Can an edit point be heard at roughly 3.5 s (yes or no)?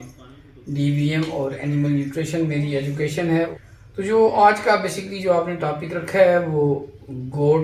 yes